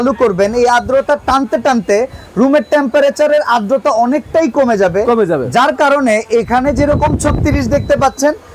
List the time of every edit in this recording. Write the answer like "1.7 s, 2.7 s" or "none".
none